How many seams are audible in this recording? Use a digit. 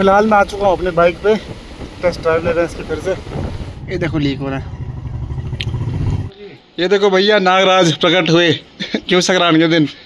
2